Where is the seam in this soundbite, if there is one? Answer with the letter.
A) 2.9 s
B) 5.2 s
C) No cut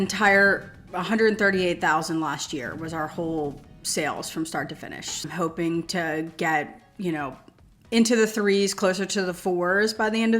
B